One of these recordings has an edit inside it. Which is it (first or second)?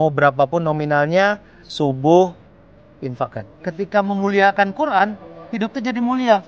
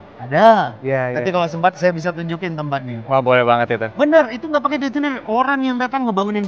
first